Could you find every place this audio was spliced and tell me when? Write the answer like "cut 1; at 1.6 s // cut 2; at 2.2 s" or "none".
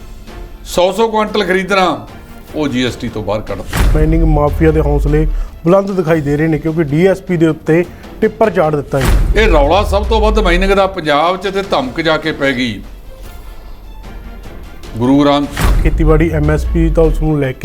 cut 1; at 3.9 s // cut 2; at 9.2 s // cut 3; at 15.8 s